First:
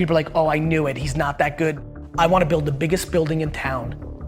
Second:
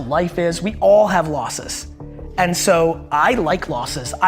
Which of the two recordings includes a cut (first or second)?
first